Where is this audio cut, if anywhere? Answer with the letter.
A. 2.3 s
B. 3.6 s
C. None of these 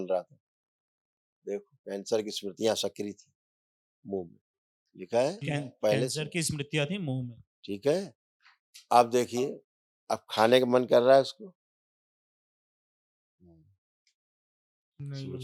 C